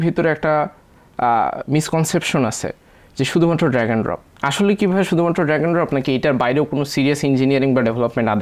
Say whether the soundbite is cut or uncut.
uncut